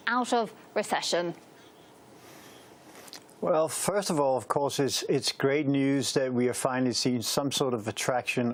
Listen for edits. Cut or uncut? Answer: uncut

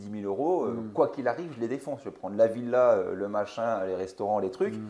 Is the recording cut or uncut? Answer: uncut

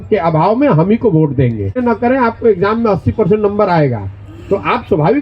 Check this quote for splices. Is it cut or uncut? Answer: cut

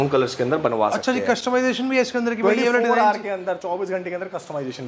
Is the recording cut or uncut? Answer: uncut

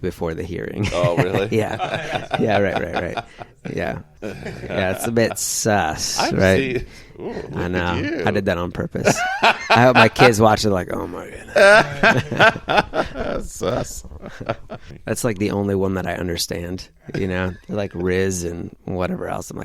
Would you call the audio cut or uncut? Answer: cut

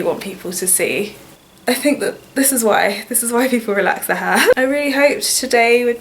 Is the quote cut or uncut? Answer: cut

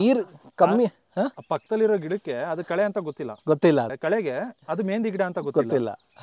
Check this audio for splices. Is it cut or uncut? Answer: cut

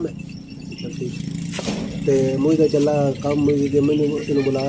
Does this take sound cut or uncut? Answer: uncut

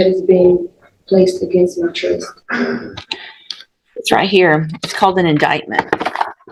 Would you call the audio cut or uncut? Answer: uncut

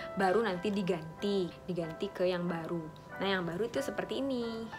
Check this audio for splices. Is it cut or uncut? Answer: cut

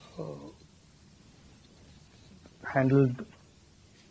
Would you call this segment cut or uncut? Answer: uncut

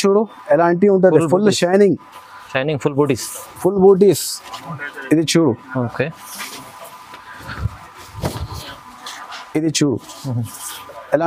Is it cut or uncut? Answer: uncut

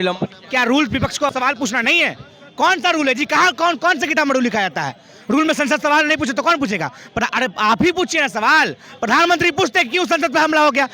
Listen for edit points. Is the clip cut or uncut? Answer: cut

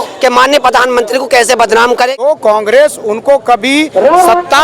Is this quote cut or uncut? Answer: cut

